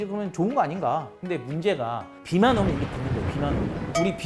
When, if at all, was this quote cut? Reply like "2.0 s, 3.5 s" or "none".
1.1 s